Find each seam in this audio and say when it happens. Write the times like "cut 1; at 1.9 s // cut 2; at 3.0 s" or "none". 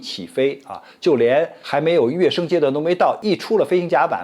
cut 1; at 3.2 s